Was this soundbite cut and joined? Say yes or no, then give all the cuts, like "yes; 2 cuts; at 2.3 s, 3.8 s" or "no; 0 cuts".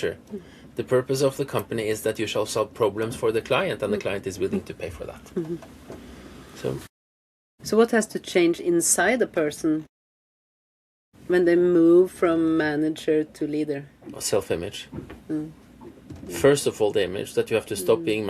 no; 0 cuts